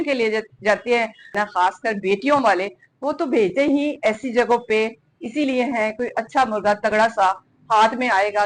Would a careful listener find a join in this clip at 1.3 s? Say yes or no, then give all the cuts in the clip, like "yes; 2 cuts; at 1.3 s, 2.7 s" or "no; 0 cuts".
yes; 1 cut; at 1.3 s